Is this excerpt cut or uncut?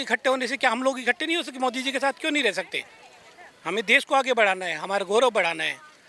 uncut